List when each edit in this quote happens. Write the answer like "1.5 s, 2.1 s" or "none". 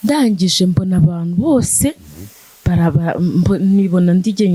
none